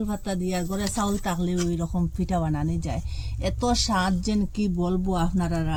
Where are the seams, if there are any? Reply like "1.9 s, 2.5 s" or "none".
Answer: none